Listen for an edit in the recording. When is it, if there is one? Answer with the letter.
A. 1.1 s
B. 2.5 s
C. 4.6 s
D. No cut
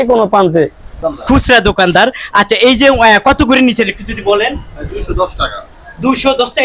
A